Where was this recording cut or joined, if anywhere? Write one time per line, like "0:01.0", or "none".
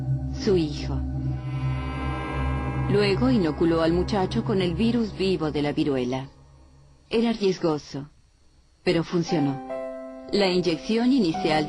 0:07.6